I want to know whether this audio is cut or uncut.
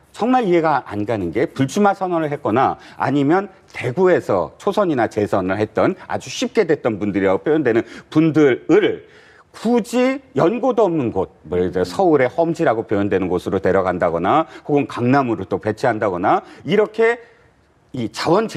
uncut